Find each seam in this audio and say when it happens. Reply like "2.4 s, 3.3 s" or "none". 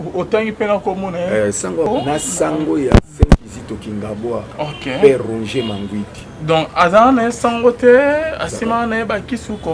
1.8 s